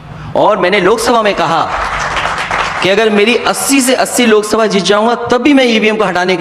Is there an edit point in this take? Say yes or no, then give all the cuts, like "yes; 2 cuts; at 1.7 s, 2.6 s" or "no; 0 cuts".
no; 0 cuts